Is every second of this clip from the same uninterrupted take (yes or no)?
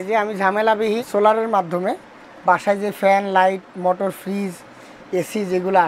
no